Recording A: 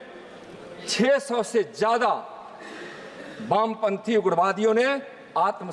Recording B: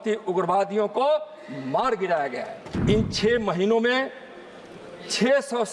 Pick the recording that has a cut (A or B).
B